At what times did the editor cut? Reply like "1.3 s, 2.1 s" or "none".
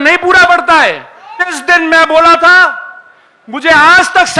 1.6 s